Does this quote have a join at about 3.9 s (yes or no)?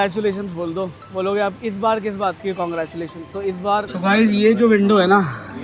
yes